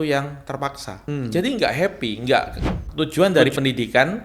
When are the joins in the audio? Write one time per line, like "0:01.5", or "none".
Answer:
0:01.0
0:02.8